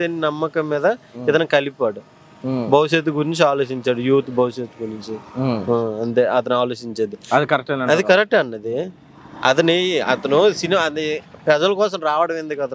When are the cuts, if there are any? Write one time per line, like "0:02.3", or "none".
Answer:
none